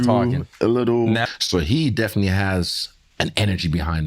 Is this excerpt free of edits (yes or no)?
no